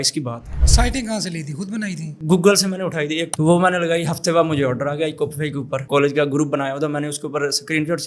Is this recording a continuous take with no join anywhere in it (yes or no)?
no